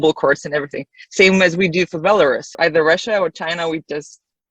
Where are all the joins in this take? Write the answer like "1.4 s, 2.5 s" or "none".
2.5 s